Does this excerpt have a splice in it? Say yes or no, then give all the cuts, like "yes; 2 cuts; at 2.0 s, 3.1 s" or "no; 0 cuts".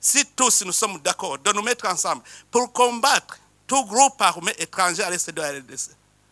no; 0 cuts